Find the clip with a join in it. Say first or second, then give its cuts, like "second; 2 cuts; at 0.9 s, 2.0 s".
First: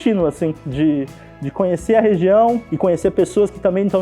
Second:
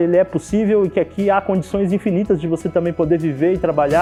first; 1 cut; at 2.7 s